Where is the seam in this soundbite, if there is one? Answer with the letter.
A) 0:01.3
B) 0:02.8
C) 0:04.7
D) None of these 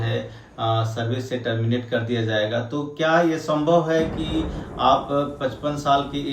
D